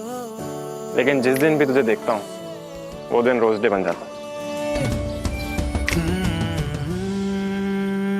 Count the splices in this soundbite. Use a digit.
1